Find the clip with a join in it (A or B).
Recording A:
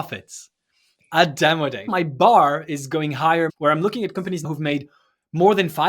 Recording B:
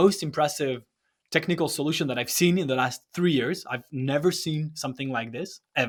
A